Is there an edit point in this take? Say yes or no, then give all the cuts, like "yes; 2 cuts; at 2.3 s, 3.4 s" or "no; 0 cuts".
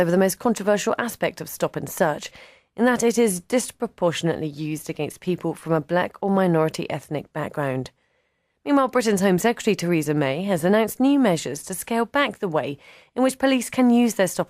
yes; 1 cut; at 1.3 s